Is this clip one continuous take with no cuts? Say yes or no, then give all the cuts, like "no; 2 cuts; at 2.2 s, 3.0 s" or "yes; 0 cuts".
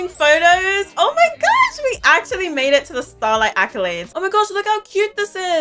no; 1 cut; at 4.0 s